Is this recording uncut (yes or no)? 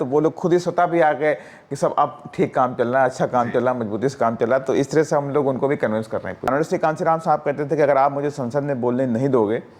no